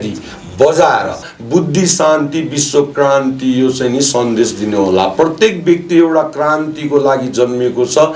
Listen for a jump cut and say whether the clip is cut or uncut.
cut